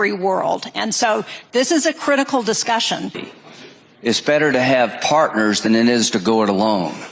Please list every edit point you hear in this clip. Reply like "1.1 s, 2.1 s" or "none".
3.2 s